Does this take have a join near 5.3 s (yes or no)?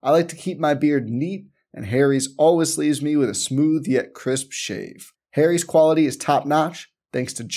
no